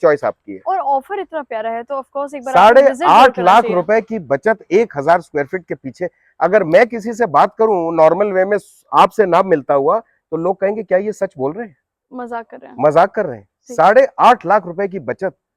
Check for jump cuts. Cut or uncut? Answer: uncut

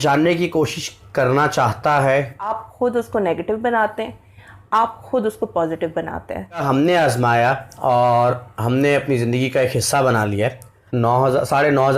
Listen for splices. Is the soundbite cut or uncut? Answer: cut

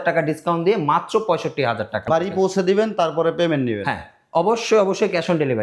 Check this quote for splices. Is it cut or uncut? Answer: cut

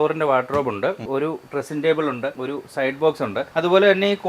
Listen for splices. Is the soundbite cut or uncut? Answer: cut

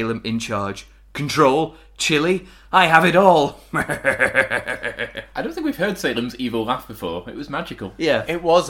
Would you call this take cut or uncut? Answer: uncut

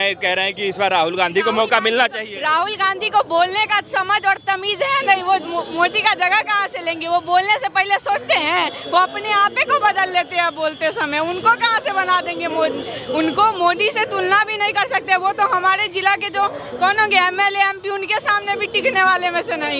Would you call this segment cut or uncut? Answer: uncut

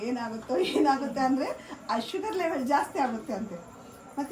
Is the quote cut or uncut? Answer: uncut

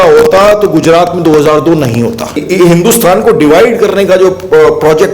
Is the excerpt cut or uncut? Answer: cut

